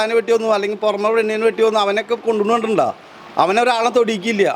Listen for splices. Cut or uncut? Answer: uncut